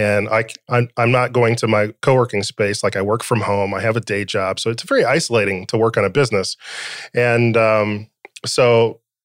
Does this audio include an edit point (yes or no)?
no